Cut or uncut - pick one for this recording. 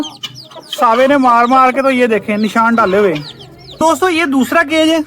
cut